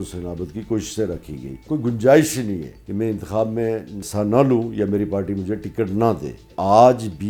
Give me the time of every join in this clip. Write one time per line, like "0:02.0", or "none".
0:01.6
0:02.8
0:04.0
0:06.5